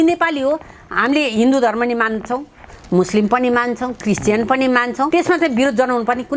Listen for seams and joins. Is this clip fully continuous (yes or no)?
no